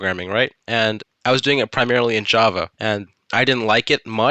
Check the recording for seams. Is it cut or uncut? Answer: cut